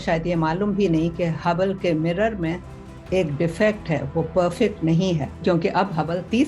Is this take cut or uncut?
uncut